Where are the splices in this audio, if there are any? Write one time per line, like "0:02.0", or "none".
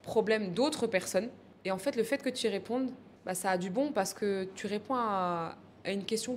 0:01.4
0:03.1